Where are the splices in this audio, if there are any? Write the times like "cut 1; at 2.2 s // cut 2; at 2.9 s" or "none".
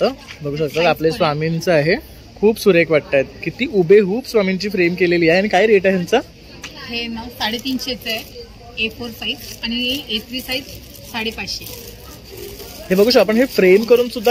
none